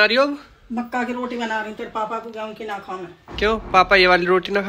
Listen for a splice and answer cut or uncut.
uncut